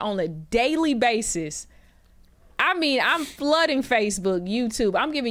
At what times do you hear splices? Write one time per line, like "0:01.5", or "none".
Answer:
none

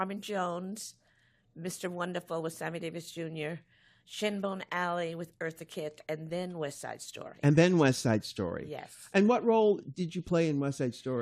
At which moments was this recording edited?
0:04.4

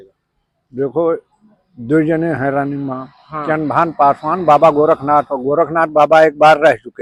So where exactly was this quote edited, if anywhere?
none

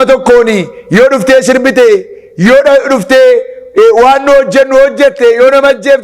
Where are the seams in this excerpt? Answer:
none

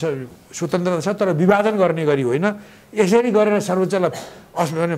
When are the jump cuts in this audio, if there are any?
none

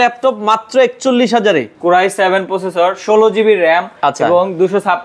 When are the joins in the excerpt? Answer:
0:01.7

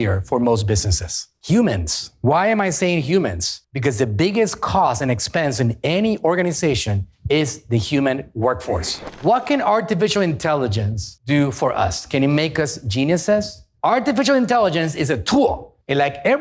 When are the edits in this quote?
0:09.0

